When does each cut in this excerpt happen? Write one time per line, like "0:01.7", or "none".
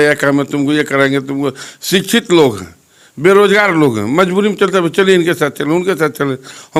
none